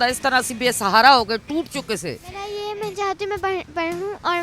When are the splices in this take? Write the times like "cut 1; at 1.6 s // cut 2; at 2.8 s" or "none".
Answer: cut 1; at 2.4 s